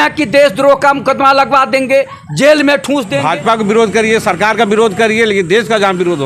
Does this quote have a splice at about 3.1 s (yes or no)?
yes